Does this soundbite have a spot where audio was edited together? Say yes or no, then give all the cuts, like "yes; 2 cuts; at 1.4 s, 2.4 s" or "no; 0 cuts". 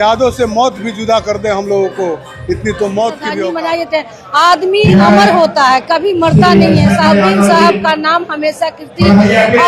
yes; 1 cut; at 3.4 s